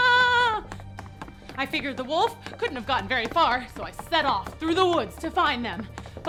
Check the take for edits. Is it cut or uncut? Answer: uncut